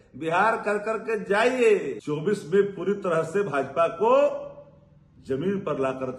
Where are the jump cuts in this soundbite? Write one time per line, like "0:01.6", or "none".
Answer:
0:02.0

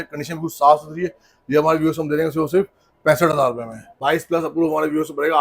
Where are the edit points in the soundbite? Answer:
0:04.0

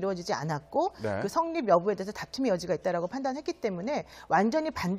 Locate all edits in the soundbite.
0:01.1

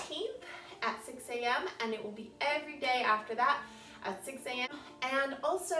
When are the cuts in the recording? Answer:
0:04.7

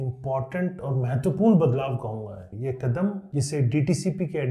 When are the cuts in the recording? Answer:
0:02.4

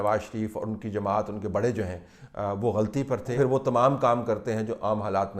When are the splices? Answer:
0:03.3

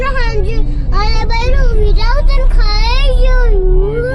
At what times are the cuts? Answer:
none

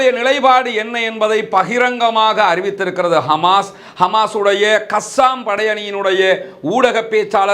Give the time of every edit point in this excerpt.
none

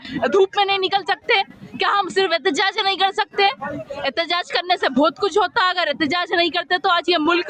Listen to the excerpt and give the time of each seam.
none

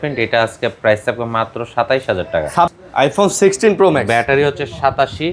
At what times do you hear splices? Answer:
0:02.7

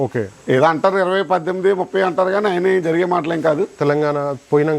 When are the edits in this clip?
0:03.7

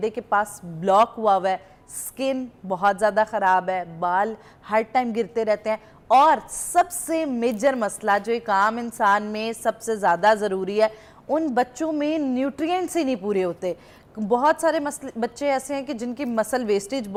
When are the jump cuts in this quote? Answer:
none

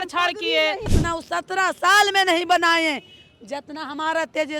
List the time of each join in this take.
0:00.9

